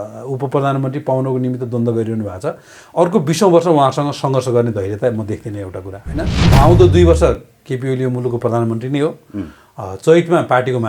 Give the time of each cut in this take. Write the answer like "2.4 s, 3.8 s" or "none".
6.4 s